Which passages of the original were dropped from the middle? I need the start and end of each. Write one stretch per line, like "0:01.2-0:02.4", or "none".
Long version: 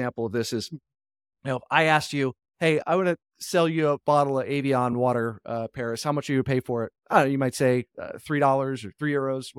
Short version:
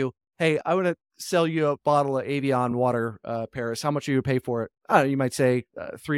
none